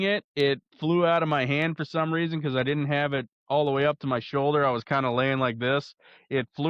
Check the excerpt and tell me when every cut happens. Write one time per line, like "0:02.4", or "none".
none

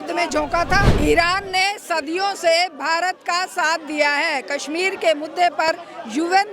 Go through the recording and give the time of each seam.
0:00.9

